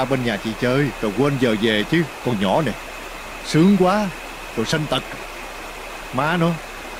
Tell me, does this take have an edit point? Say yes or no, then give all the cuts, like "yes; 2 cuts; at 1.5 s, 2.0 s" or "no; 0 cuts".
no; 0 cuts